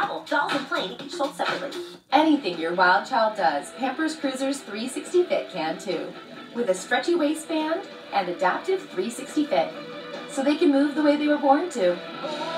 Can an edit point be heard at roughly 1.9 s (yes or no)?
yes